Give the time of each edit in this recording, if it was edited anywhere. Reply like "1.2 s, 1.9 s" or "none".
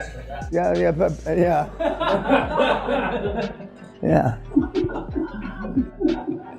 4.4 s